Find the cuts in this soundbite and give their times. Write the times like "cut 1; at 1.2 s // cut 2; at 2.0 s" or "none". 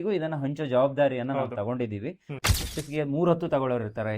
cut 1; at 2.7 s

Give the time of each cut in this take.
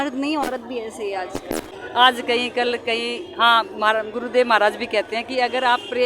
cut 1; at 1.7 s

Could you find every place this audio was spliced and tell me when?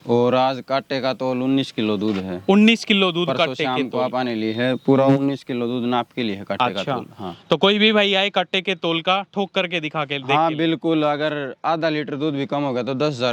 none

